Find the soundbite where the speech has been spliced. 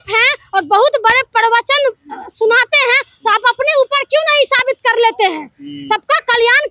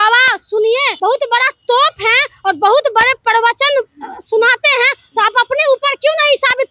second; 1 cut; at 0.9 s

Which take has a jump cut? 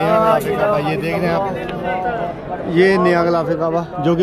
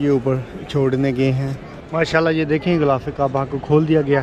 second; 1 cut; at 1.8 s

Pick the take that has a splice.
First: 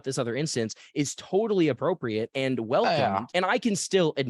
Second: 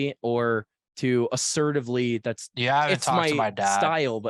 first; 1 cut; at 3.3 s

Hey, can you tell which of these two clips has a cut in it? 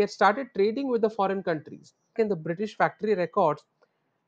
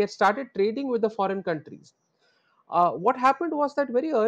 first; 1 cut; at 2.1 s

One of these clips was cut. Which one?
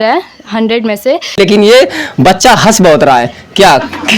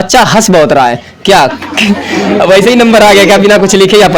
first; 1 cut; at 1.4 s

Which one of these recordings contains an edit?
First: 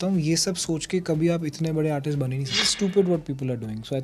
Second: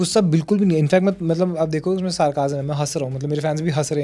first; 1 cut; at 2.7 s

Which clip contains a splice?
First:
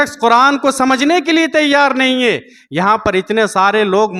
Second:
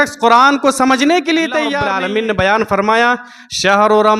second; 1 cut; at 1.9 s

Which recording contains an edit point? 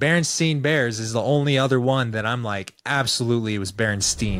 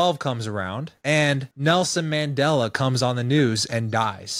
second; 2 cuts; at 0.9 s, 1.5 s

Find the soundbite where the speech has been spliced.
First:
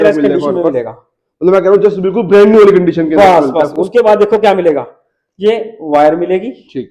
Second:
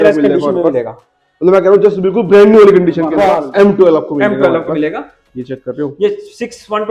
second; 1 cut; at 3.3 s

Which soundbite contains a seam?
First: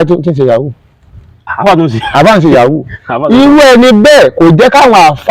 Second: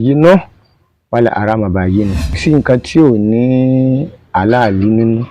second; 1 cut; at 2.4 s

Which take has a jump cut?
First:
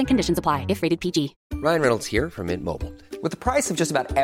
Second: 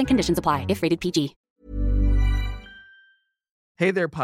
first; 1 cut; at 1.4 s

